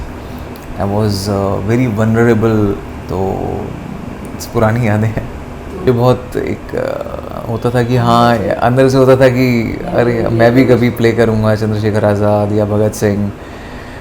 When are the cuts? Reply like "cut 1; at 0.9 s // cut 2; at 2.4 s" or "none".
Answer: cut 1; at 5.9 s